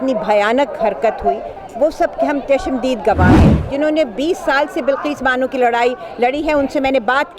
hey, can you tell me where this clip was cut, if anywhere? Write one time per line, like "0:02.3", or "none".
0:03.6